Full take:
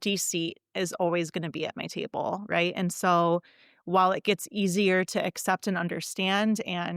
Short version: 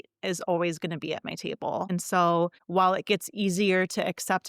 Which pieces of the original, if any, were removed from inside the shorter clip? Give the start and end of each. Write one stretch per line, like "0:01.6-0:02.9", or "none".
0:02.4-0:02.8
0:03.5-0:03.8